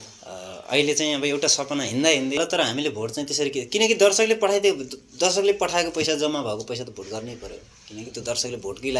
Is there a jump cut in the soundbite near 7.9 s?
no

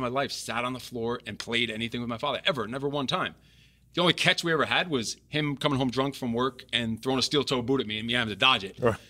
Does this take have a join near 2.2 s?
no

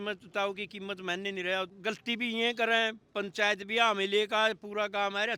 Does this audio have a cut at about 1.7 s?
yes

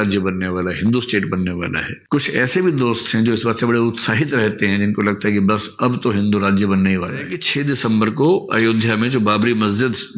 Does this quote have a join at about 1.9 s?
no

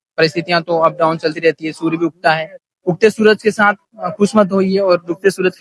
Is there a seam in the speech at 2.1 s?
no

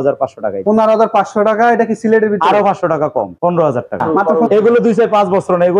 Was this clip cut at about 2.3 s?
no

